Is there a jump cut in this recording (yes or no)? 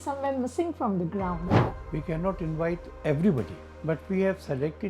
yes